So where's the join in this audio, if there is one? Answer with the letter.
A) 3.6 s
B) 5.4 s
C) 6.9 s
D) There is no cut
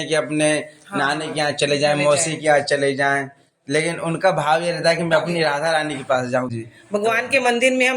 C